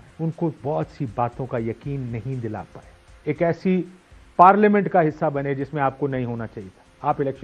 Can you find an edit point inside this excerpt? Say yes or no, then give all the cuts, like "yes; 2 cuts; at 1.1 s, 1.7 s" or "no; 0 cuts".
yes; 1 cut; at 3.1 s